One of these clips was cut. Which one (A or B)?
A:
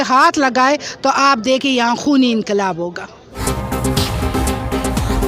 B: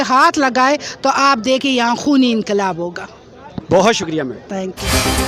A